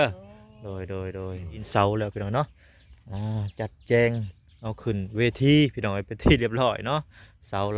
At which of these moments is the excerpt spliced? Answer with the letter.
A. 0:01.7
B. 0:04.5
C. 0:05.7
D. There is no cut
A